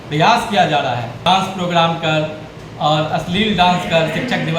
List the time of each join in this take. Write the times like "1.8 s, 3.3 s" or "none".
1.2 s